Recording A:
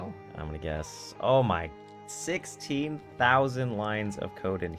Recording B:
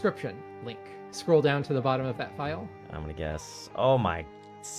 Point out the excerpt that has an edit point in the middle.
B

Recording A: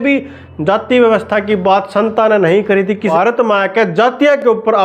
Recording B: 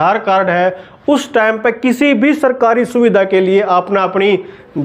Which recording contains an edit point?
A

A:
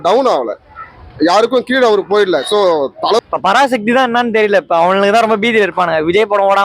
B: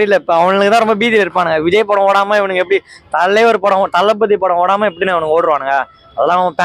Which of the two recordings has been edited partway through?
A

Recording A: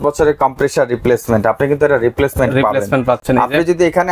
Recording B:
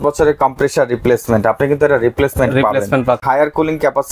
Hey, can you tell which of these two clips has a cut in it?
B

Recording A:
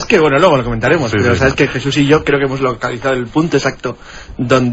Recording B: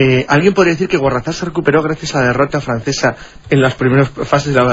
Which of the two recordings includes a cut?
A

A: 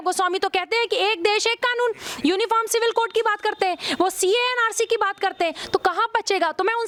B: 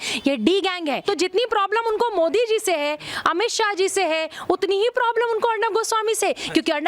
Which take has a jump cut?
B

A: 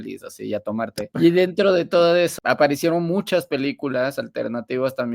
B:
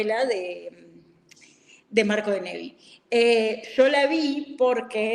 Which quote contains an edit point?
A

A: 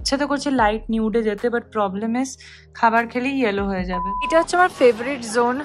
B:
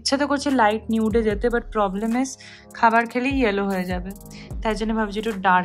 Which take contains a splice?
A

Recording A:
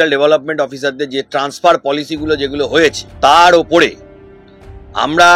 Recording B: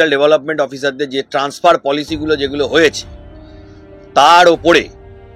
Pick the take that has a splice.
A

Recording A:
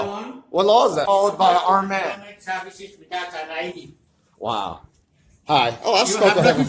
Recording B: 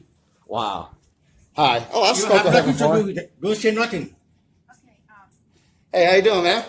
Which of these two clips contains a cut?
A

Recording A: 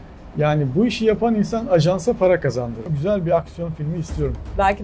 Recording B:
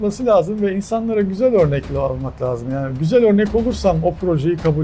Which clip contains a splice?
A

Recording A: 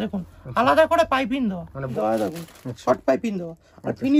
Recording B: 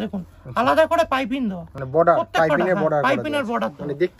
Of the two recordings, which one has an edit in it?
A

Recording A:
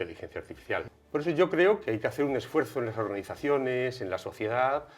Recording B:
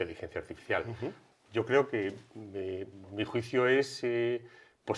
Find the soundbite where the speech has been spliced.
A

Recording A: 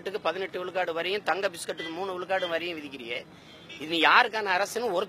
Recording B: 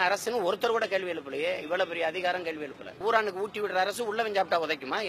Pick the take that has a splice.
B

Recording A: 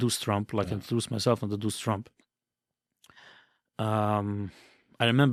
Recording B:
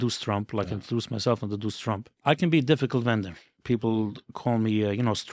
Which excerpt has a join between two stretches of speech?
B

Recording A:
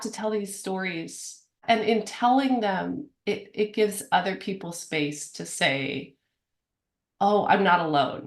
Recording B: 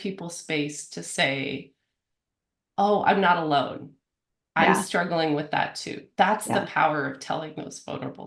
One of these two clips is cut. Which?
A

